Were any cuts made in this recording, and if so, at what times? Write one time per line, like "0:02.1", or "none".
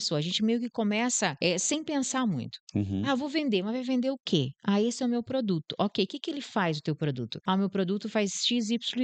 0:01.4
0:07.3